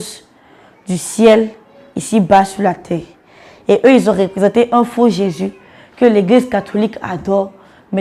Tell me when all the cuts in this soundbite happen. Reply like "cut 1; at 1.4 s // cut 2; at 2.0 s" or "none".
none